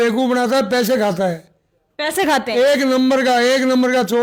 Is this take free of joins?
yes; 0 cuts

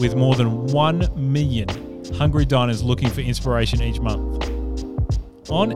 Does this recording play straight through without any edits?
yes; 0 cuts

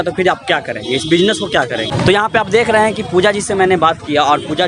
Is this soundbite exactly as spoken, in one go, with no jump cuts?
no; 1 cut; at 1.9 s

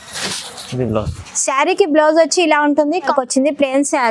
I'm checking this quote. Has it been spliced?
yes; 1 cut; at 3.1 s

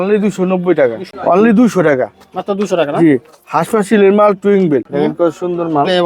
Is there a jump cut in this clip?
yes; 2 cuts; at 1.1 s, 4.9 s

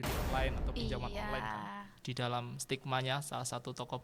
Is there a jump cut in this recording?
yes; 1 cut; at 1.9 s

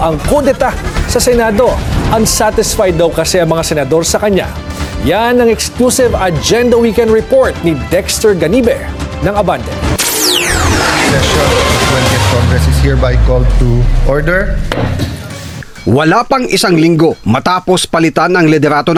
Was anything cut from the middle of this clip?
no; 0 cuts

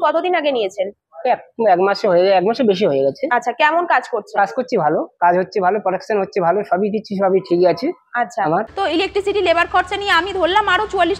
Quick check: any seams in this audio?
yes; 1 cut; at 8.7 s

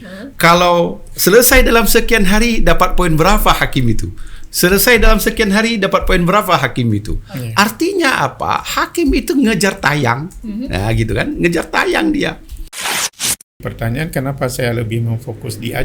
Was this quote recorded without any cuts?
no; 1 cut; at 13.1 s

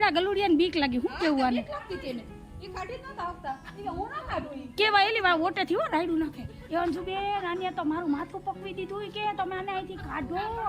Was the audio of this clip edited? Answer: no; 0 cuts

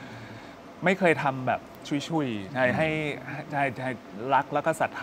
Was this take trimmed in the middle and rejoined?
no; 0 cuts

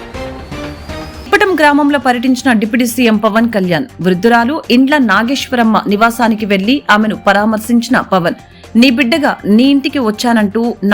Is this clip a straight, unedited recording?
no; 1 cut; at 1.1 s

